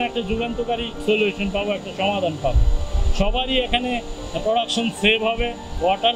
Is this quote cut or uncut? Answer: cut